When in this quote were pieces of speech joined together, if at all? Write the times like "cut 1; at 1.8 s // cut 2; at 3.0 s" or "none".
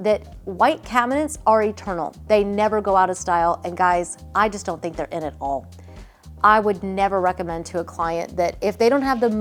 none

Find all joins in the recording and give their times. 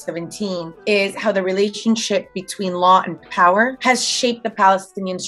none

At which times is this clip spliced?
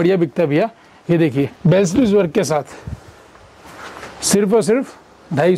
cut 1; at 1.5 s

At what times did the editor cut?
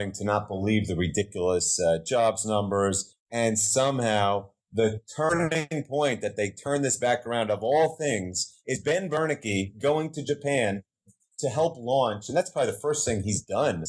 none

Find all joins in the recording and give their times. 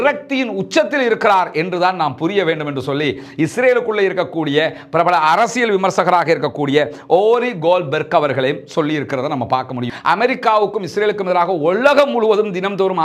cut 1; at 9.8 s

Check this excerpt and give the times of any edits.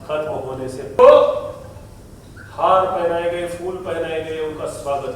cut 1; at 1.0 s

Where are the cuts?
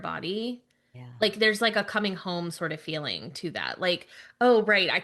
none

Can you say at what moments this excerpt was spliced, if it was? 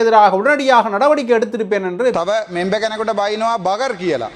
cut 1; at 2.1 s

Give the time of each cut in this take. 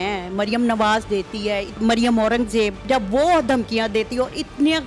cut 1; at 1.8 s // cut 2; at 2.8 s

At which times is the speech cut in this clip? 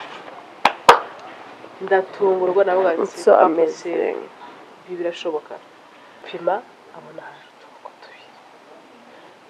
cut 1; at 6.3 s

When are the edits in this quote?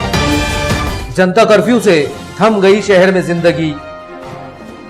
cut 1; at 0.9 s

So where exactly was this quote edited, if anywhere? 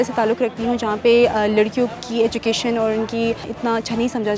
cut 1; at 3.5 s

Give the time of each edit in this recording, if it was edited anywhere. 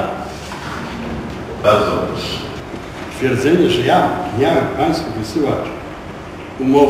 cut 1; at 2.6 s

